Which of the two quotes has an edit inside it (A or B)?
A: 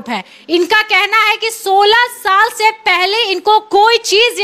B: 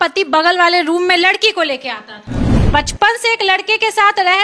B